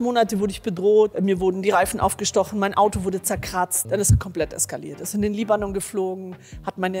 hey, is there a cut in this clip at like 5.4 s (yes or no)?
no